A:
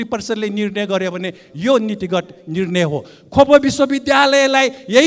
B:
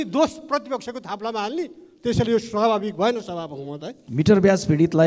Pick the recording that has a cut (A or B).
B